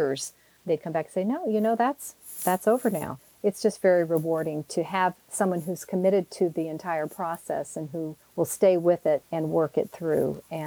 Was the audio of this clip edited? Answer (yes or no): yes